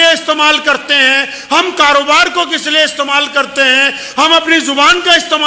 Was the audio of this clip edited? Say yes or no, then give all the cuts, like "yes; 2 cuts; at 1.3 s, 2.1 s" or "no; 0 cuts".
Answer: no; 0 cuts